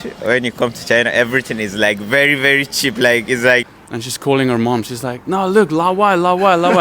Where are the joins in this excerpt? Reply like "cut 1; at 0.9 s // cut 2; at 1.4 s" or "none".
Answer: cut 1; at 3.7 s